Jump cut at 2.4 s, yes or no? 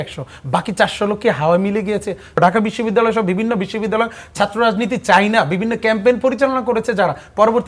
yes